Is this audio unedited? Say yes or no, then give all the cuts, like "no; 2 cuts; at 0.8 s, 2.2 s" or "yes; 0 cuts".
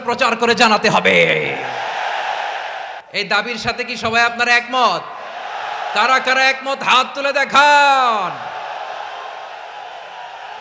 no; 1 cut; at 3.0 s